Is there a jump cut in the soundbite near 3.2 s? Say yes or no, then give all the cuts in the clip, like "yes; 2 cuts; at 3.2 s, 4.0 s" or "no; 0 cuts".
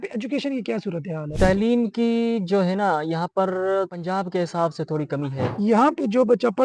no; 2 cuts; at 1.3 s, 5.5 s